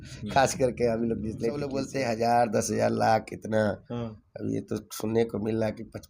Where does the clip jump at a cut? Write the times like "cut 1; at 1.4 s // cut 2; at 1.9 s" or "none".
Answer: cut 1; at 1.8 s